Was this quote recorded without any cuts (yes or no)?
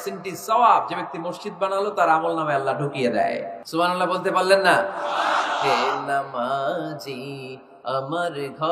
no